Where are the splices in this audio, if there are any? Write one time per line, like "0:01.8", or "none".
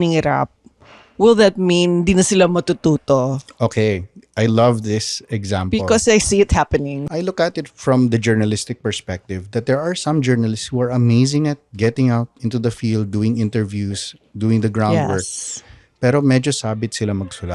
0:07.0